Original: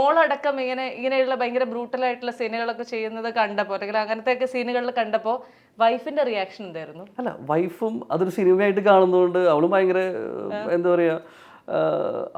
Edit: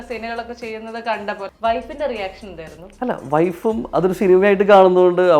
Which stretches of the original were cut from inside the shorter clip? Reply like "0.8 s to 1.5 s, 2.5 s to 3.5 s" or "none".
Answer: 3.8 s to 5.7 s